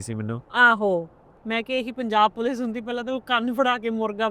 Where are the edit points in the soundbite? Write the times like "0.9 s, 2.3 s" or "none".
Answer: 1.3 s